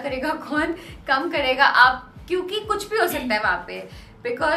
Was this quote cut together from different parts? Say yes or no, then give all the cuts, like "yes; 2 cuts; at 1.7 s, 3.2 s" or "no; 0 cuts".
no; 0 cuts